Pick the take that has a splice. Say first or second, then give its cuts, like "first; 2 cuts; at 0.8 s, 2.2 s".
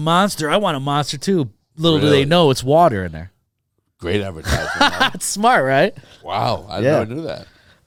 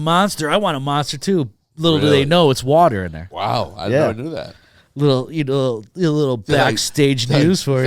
second; 1 cut; at 3.2 s